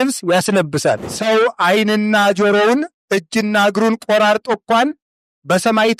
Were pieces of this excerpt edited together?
yes; 1 cut; at 1.1 s

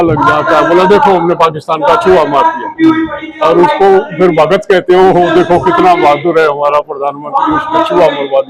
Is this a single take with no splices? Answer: yes; 0 cuts

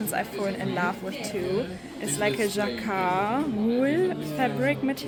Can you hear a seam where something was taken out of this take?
no; 0 cuts

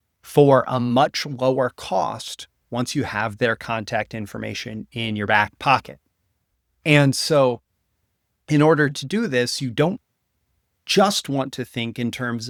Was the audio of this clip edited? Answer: no; 0 cuts

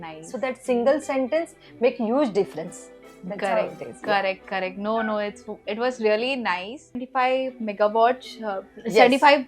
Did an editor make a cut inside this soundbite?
yes; 1 cut; at 7.1 s

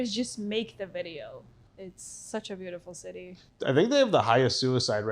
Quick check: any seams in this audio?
yes; 1 cut; at 1.6 s

